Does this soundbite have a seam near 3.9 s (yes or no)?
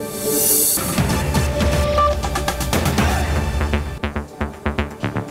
yes